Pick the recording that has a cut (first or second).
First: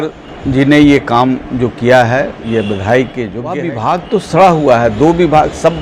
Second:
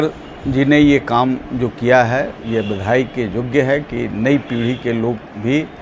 first